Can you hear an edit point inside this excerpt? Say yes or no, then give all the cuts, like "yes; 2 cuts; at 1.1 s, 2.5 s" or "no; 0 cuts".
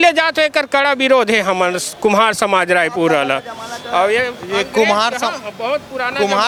no; 0 cuts